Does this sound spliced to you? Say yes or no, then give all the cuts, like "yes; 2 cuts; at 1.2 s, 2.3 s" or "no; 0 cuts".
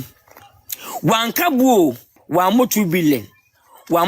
yes; 1 cut; at 2.1 s